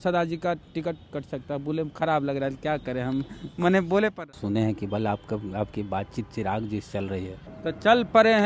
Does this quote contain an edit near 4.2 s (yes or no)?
yes